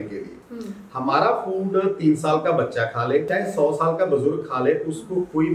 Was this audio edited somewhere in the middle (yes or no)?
yes